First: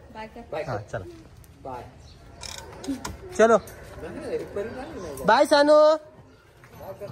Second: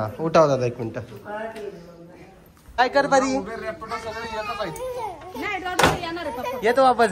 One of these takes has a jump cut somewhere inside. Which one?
second; 1 cut; at 2.8 s

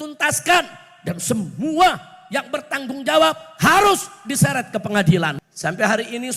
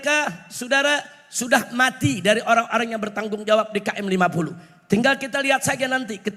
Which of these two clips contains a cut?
first; 1 cut; at 5.4 s

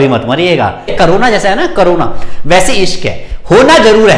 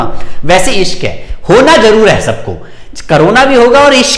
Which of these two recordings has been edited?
first; 1 cut; at 0.9 s

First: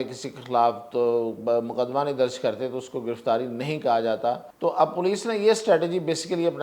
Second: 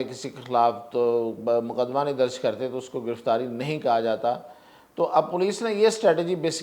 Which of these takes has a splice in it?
first; 1 cut; at 4.5 s

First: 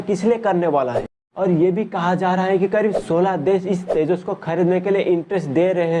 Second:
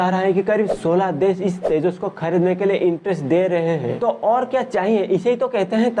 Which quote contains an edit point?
first; 1 cut; at 1.2 s

